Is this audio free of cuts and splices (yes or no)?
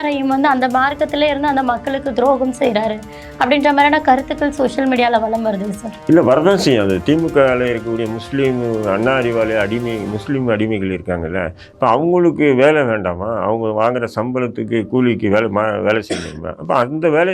yes